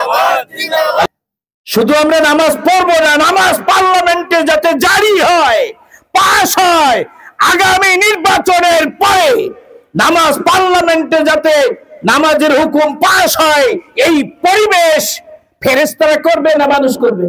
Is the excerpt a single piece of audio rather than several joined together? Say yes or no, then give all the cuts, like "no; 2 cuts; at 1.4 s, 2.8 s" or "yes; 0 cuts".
no; 1 cut; at 1.1 s